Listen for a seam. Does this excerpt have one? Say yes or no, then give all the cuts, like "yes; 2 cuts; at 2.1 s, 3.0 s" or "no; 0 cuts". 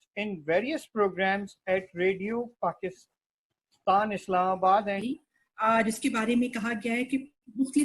yes; 1 cut; at 5.0 s